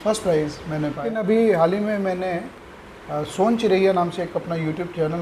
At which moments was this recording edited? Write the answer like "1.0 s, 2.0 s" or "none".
1.2 s